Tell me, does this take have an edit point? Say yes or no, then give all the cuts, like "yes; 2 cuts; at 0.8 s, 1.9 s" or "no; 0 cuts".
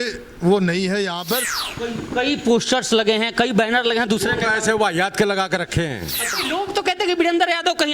yes; 2 cuts; at 1.5 s, 6.3 s